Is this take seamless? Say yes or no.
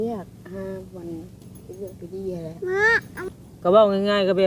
no